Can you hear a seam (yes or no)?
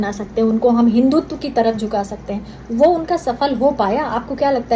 no